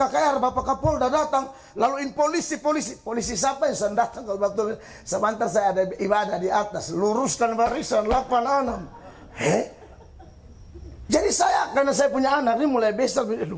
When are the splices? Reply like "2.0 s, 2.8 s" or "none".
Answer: none